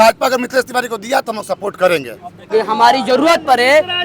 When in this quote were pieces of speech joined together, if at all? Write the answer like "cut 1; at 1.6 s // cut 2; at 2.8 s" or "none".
cut 1; at 2.5 s